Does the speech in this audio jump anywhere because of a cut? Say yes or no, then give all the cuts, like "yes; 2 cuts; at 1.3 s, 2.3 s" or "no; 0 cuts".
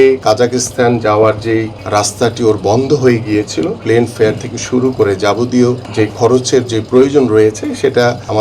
yes; 1 cut; at 3.8 s